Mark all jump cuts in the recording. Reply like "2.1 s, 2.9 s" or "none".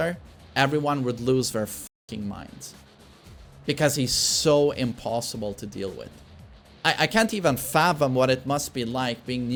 none